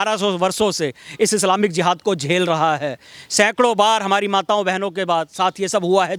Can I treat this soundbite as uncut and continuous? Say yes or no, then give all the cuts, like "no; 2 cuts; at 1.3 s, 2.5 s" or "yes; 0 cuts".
yes; 0 cuts